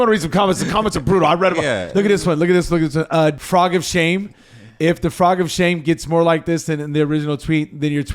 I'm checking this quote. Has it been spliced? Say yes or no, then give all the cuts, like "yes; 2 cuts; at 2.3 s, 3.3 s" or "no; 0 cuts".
yes; 1 cut; at 3.4 s